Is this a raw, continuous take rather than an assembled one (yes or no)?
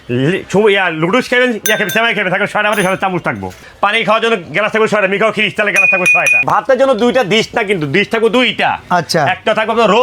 no